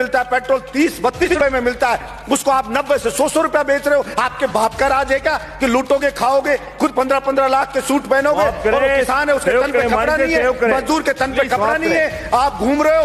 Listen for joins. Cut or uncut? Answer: cut